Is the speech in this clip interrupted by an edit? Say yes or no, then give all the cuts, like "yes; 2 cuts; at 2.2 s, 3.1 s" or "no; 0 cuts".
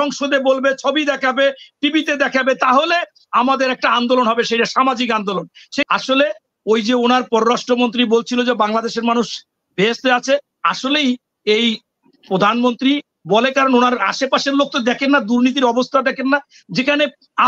yes; 1 cut; at 5.9 s